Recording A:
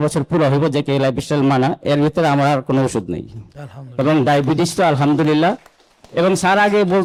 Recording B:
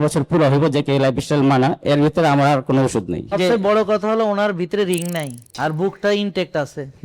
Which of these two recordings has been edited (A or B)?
B